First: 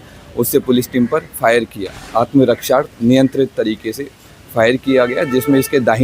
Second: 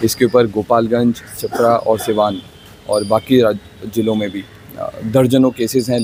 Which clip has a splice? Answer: first; 1 cut; at 2.0 s

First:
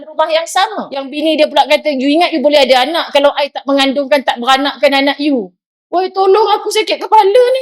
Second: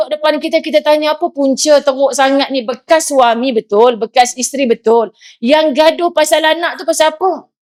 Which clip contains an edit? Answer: first; 1 cut; at 1.0 s

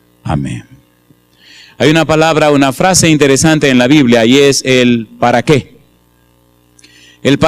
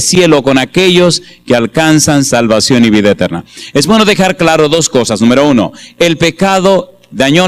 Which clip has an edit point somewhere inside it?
first; 1 cut; at 3.7 s

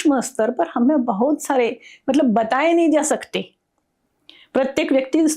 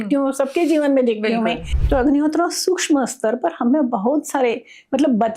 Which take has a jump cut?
second; 1 cut; at 1.7 s

